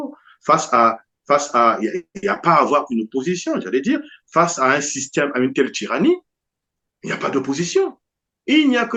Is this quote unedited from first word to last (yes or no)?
yes